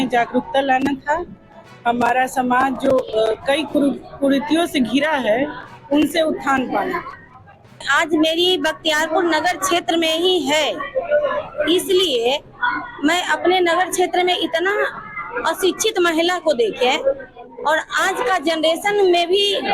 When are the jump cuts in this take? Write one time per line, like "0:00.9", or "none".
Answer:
0:07.7